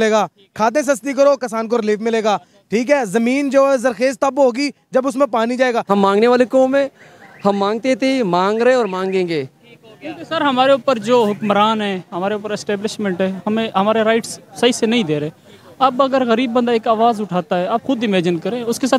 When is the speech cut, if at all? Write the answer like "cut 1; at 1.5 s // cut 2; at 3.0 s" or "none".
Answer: cut 1; at 5.8 s